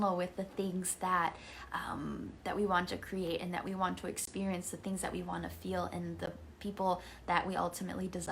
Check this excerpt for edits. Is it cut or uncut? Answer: uncut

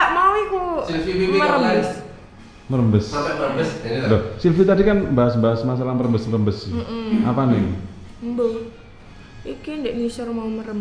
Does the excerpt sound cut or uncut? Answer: uncut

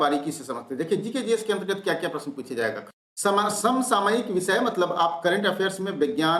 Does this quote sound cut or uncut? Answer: cut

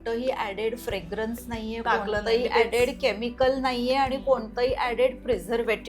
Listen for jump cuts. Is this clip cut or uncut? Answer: uncut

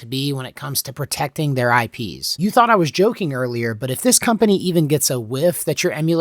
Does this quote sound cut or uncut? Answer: cut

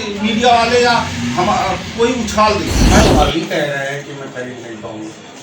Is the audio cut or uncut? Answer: cut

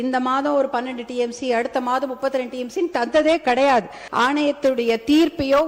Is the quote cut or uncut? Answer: cut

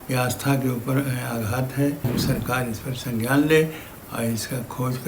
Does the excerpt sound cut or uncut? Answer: cut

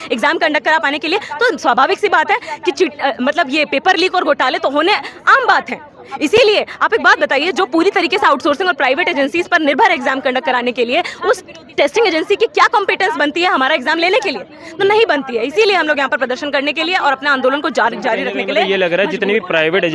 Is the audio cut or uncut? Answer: uncut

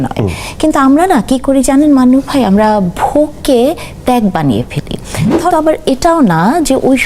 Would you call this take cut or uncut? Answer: cut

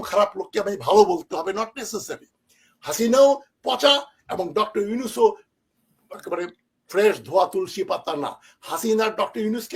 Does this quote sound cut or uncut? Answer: uncut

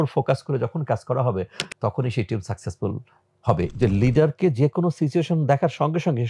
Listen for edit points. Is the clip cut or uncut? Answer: cut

